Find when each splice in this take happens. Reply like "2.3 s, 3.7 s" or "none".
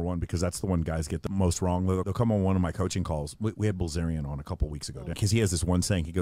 1.3 s, 2.1 s, 5.2 s